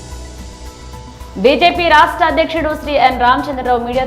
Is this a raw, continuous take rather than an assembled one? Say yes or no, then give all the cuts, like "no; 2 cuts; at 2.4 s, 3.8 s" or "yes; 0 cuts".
no; 1 cut; at 1.2 s